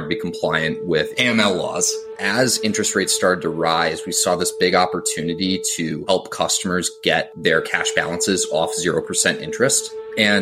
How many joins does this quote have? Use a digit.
2